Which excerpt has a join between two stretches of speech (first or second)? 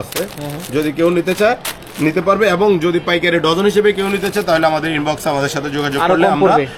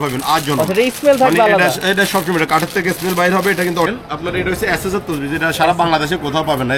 second